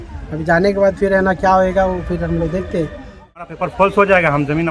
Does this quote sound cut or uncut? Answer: cut